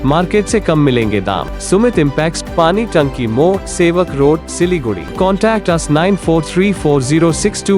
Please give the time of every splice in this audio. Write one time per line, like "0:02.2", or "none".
0:01.5
0:05.1